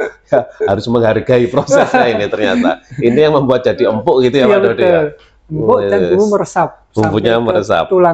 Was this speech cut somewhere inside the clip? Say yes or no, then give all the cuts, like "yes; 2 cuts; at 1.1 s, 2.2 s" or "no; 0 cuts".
no; 0 cuts